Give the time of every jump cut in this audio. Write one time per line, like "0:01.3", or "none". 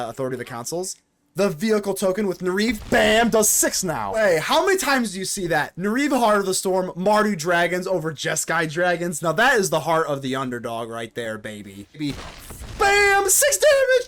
0:04.2
0:12.0